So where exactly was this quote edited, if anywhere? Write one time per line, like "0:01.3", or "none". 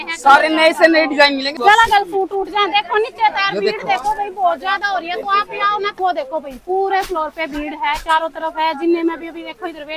0:01.5
0:05.9